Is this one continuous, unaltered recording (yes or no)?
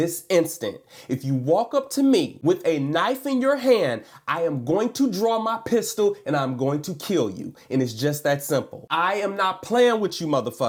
yes